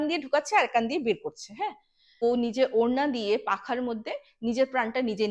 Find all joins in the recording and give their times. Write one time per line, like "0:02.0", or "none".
0:02.2

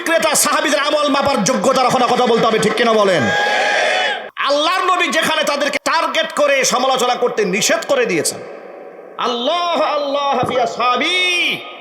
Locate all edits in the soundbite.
0:04.3
0:05.7

